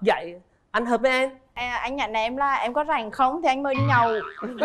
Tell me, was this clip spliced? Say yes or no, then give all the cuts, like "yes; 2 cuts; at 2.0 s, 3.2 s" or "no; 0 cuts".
yes; 1 cut; at 1.5 s